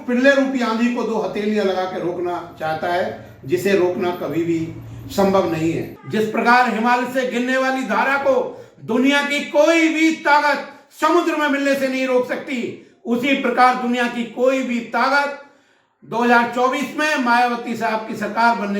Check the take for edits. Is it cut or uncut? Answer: cut